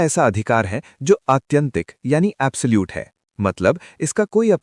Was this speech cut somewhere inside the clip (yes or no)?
no